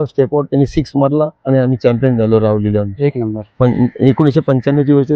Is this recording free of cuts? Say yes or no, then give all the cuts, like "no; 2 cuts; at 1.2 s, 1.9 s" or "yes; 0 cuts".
yes; 0 cuts